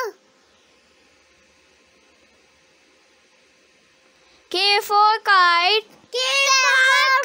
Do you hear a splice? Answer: yes; 1 cut; at 4.3 s

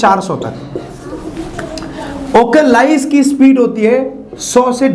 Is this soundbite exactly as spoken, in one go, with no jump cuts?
yes; 0 cuts

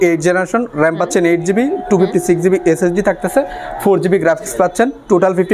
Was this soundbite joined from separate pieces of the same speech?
no; 0 cuts

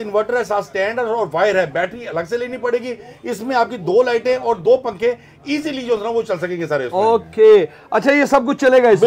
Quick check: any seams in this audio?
no; 0 cuts

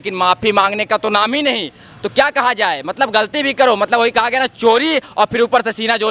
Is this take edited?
no; 0 cuts

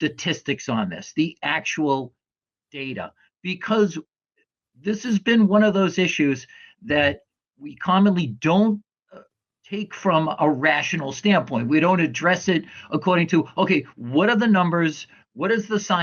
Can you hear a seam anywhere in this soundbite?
no; 0 cuts

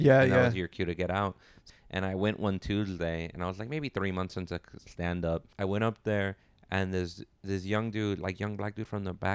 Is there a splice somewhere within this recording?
yes; 2 cuts; at 1.6 s, 5.5 s

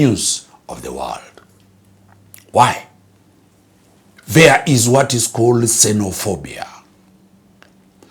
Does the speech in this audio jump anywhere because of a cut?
no; 0 cuts

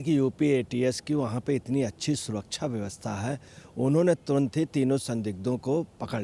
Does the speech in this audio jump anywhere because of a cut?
no; 0 cuts

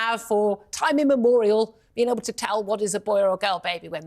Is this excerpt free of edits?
yes; 0 cuts

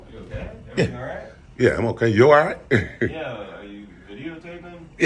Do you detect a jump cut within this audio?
no; 0 cuts

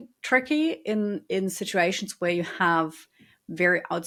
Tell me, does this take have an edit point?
no; 0 cuts

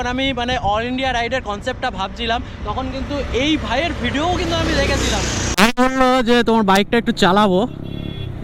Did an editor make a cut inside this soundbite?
yes; 1 cut; at 5.5 s

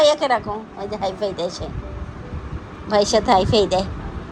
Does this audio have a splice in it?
no; 0 cuts

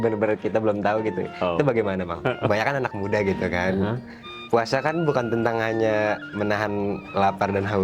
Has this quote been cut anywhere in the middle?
yes; 1 cut; at 2.5 s

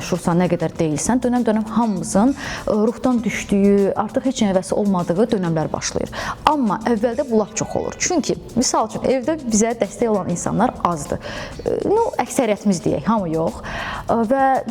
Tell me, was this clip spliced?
no; 0 cuts

